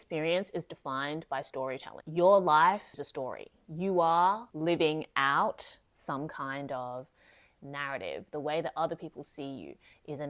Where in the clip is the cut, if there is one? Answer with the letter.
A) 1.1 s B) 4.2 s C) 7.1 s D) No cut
D